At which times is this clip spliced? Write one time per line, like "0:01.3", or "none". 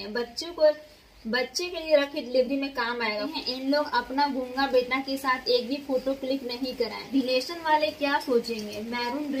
0:03.3
0:07.1